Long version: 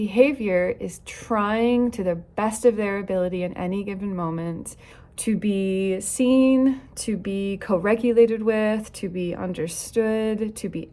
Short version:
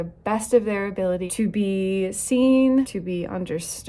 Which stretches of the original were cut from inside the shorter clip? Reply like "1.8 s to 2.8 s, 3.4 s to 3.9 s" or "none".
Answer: 3.4 s to 5.2 s, 6.8 s to 9.0 s